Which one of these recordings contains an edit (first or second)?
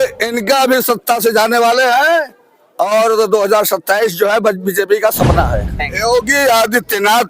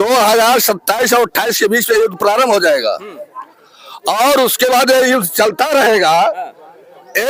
first